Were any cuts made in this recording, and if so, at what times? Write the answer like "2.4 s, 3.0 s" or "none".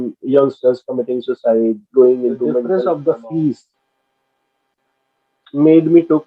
2.7 s